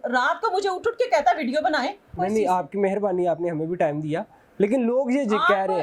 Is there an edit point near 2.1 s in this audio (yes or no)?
yes